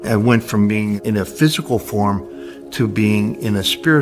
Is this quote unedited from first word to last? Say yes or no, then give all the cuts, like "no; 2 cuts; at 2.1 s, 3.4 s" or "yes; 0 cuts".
no; 1 cut; at 1.0 s